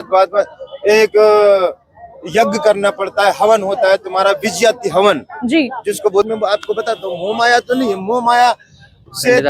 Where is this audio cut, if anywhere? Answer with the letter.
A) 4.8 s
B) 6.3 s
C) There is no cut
B